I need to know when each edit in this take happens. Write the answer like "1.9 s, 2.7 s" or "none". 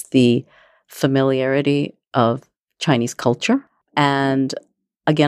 3.7 s